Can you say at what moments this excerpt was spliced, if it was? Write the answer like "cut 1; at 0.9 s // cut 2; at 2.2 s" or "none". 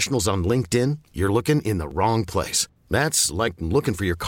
none